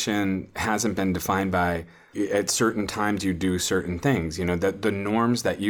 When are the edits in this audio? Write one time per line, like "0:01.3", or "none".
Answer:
0:02.1